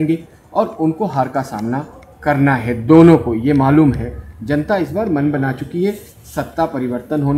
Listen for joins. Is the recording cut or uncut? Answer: uncut